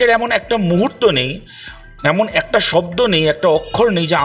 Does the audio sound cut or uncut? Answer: uncut